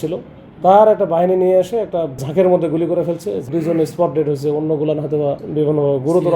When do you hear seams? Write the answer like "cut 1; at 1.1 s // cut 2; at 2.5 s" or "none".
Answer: cut 1; at 2.2 s // cut 2; at 3.5 s // cut 3; at 5.4 s